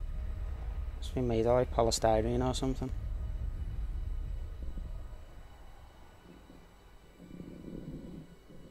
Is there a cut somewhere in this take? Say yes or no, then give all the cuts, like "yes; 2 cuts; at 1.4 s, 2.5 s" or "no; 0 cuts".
yes; 1 cut; at 1.7 s